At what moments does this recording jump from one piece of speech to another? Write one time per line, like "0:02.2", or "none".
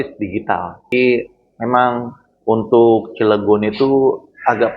0:00.9

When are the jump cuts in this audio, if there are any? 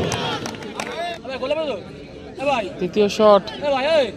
0:01.1

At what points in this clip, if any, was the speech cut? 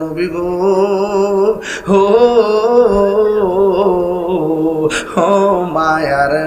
none

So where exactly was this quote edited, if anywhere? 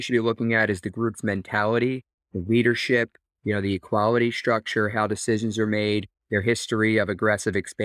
none

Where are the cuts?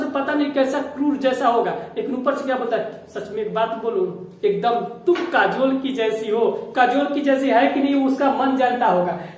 none

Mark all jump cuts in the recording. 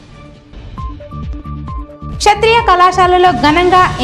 0:02.0

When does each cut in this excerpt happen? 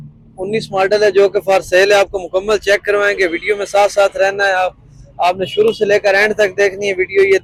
none

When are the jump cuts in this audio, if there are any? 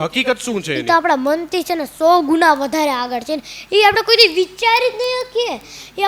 none

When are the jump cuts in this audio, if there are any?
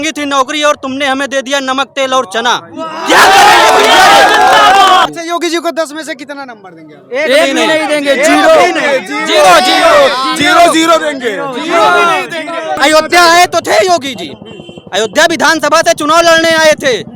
0:05.1
0:12.8

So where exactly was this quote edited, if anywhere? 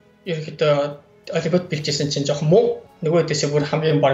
0:02.8

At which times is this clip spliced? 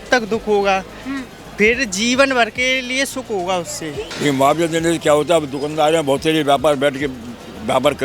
0:04.1

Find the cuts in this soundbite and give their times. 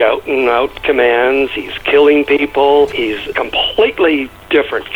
0:03.3

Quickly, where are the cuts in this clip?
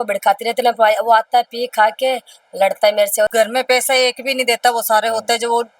0:03.3

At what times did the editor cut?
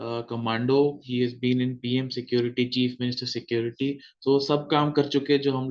none

